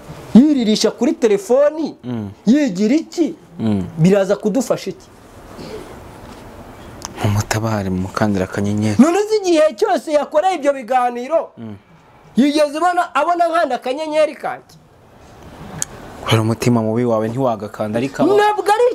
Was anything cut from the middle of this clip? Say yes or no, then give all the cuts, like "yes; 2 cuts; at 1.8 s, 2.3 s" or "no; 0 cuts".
no; 0 cuts